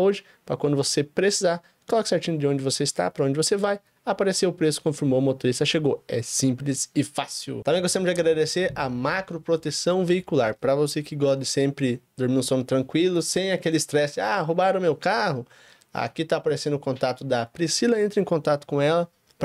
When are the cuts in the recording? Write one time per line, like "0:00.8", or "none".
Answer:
0:07.5